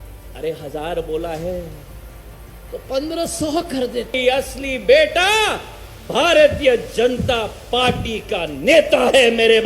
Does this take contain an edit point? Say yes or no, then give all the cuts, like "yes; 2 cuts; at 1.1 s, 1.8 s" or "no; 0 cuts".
yes; 1 cut; at 4.2 s